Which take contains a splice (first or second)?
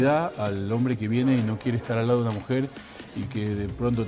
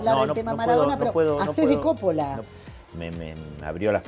second